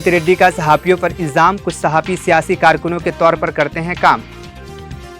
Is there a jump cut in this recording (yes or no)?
no